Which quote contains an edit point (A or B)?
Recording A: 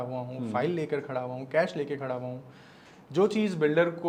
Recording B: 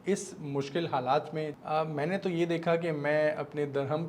B